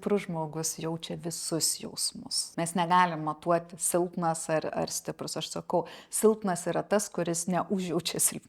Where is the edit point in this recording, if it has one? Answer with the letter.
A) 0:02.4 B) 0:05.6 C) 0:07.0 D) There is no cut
A